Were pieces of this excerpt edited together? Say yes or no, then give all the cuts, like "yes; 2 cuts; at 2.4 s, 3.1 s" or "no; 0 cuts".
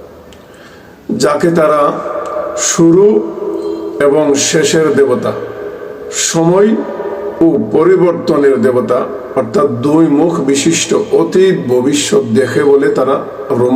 no; 0 cuts